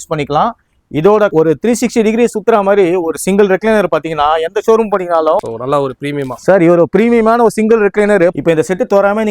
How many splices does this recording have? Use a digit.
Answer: 3